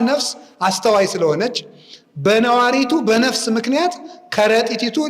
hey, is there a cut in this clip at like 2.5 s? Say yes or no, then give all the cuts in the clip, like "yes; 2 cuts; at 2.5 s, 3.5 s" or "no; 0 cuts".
no; 0 cuts